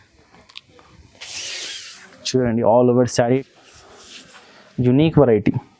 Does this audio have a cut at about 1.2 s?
no; 1 cut; at 3.4 s

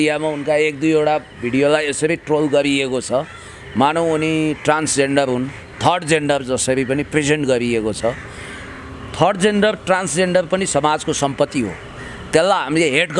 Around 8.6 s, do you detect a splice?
no; 0 cuts

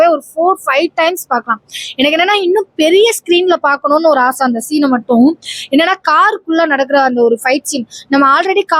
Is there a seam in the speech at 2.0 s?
no; 0 cuts

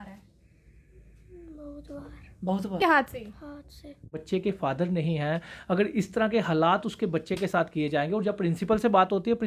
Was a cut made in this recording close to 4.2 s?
yes; 2 cuts; at 2.8 s, 4.2 s

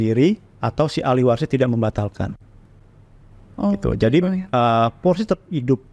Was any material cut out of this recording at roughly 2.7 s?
no; 0 cuts

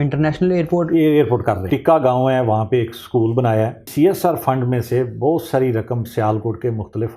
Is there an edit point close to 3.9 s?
yes; 2 cuts; at 1.6 s, 3.9 s

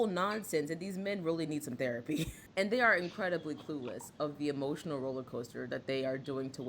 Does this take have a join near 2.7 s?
yes; 1 cut; at 2.7 s

